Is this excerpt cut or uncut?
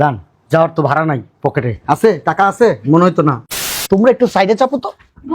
cut